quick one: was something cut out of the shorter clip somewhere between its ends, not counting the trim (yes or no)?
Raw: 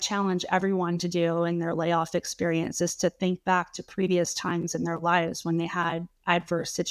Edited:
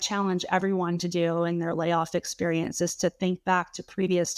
no